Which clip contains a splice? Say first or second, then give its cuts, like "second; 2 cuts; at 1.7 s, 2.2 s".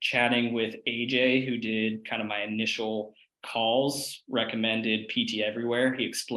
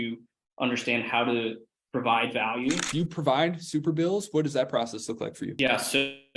second; 1 cut; at 2.9 s